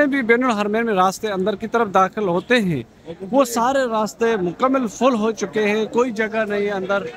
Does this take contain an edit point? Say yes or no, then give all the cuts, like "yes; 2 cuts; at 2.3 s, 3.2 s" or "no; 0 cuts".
no; 0 cuts